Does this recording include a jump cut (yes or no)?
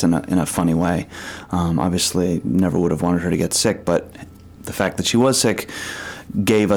no